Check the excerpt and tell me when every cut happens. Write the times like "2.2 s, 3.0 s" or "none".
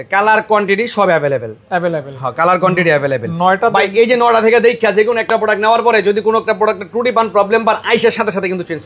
none